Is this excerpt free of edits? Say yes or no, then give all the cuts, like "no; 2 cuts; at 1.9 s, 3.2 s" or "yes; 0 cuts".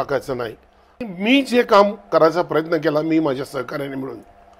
no; 1 cut; at 1.0 s